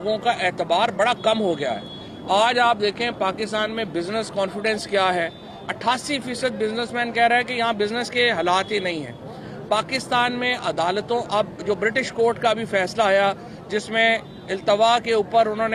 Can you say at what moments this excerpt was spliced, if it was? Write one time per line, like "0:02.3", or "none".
none